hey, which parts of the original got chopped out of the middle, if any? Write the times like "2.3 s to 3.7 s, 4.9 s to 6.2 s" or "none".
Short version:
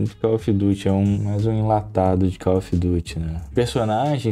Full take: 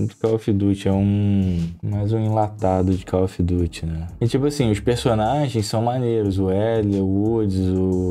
1.2 s to 1.9 s, 4.2 s to 4.8 s